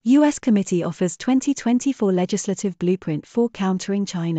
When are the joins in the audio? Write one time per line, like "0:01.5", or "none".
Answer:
none